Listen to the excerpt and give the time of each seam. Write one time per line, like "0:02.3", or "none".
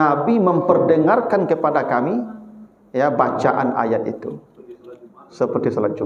none